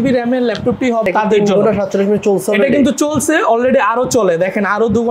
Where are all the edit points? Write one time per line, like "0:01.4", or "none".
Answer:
0:01.1